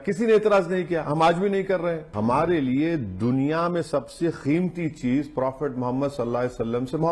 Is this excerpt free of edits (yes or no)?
no